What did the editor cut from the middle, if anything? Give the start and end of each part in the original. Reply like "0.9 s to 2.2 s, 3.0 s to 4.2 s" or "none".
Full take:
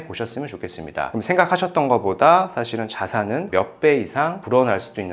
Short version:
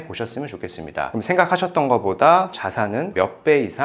2.5 s to 2.9 s